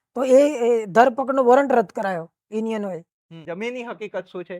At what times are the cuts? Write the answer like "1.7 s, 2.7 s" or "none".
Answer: 3.4 s